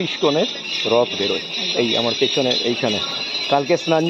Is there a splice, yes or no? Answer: no